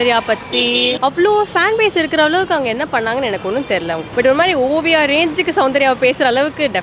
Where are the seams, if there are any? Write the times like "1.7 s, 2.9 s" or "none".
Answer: 1.0 s, 4.1 s